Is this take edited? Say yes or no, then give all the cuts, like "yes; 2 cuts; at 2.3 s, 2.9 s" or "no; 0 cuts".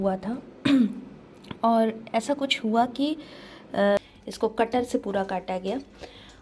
yes; 1 cut; at 4.0 s